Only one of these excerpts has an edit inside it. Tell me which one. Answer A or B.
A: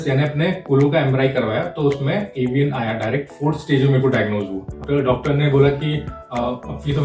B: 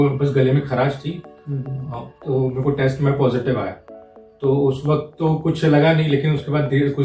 A